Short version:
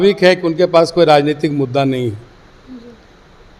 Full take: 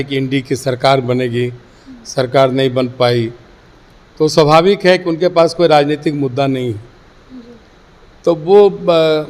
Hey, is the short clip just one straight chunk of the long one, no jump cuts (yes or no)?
yes